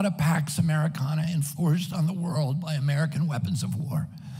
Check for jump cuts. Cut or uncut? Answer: uncut